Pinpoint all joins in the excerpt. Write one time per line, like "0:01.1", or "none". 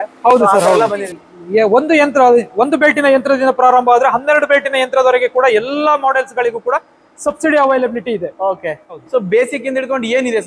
0:01.0
0:09.0